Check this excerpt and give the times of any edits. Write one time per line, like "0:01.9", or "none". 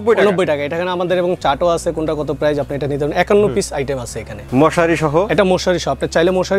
0:04.4